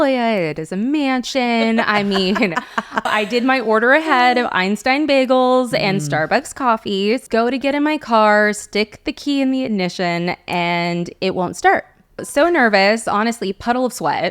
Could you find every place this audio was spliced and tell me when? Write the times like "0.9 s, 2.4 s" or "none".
3.1 s, 7.2 s, 12.3 s